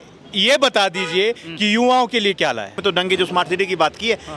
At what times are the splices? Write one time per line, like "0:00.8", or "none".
0:02.8